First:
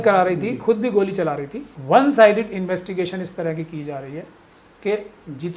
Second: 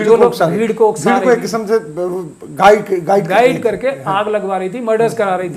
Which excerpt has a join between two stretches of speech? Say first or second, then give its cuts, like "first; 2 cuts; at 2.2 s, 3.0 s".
first; 1 cut; at 1.7 s